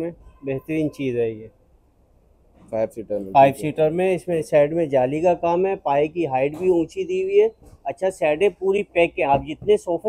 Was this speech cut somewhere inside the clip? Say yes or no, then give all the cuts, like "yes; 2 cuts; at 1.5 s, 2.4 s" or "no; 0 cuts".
no; 0 cuts